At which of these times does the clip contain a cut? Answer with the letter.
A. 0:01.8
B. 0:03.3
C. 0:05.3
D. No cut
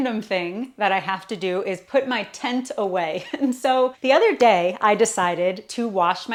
D